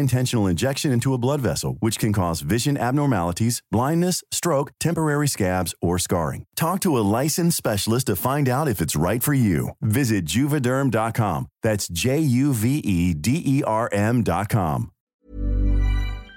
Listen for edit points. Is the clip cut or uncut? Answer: cut